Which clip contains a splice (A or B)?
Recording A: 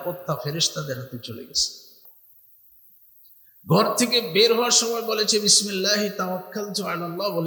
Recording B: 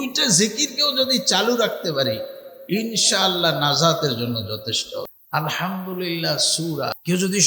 B